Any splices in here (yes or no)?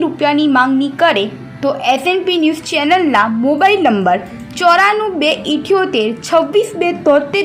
no